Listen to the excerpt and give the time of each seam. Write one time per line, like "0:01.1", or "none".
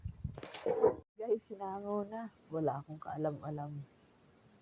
0:01.1